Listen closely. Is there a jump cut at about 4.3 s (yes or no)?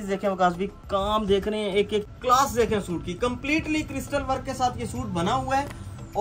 no